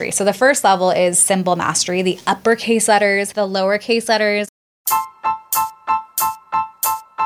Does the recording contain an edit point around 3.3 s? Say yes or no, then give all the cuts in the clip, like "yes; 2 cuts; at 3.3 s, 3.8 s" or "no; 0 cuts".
yes; 2 cuts; at 3.3 s, 4.5 s